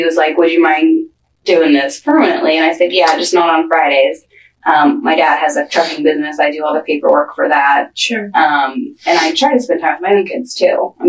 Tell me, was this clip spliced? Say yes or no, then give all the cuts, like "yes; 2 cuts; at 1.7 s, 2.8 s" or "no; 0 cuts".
no; 0 cuts